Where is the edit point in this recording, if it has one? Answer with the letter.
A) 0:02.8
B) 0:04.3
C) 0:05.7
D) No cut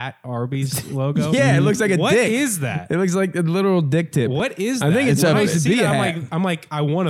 D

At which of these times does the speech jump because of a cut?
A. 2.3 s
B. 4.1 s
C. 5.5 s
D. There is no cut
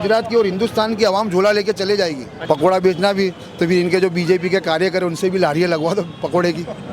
A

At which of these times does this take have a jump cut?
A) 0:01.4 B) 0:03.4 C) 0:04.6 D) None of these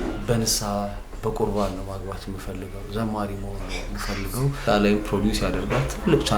C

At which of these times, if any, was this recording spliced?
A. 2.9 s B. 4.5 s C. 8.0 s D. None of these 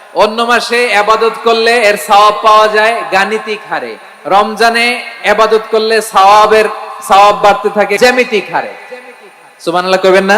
C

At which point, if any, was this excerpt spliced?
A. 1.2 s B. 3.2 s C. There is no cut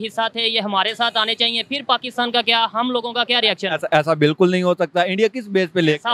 C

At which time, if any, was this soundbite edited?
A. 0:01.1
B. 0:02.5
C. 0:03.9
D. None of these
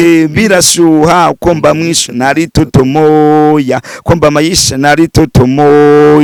D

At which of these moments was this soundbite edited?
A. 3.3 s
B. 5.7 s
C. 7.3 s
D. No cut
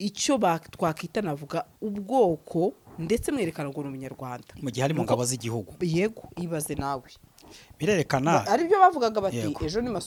D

